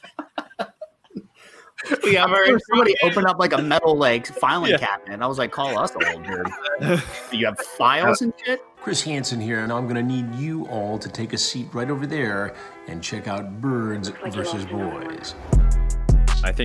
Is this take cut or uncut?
cut